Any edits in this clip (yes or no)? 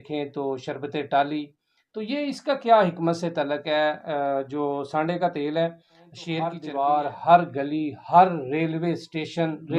yes